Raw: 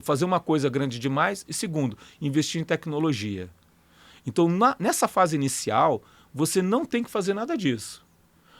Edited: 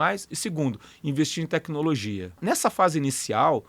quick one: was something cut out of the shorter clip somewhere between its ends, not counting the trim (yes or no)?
yes